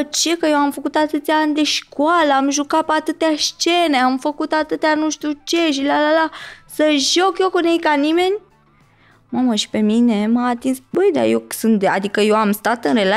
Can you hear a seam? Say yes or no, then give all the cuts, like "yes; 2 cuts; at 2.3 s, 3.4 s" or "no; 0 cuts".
yes; 1 cut; at 10.8 s